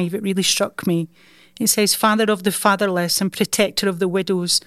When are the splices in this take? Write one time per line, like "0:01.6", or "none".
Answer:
none